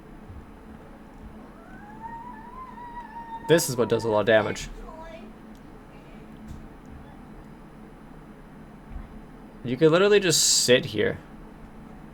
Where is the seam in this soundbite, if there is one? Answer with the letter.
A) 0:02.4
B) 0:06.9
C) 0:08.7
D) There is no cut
D